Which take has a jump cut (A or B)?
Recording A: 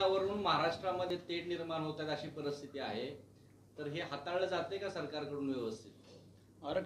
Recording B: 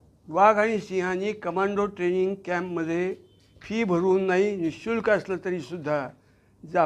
A